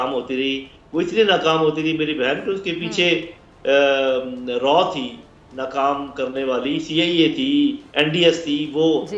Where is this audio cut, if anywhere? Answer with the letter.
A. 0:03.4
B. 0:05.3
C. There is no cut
C